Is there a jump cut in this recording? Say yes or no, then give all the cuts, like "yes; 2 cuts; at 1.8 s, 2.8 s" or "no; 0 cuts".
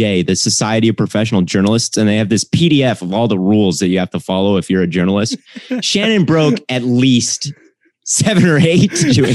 no; 0 cuts